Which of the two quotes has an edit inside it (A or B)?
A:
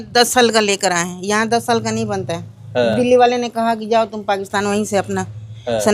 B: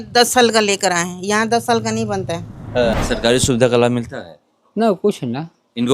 B